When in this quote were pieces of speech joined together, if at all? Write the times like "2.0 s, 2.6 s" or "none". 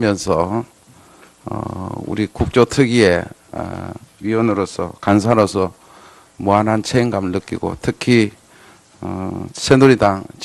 none